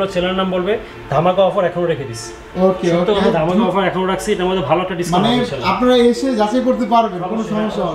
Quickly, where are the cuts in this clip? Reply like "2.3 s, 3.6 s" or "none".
none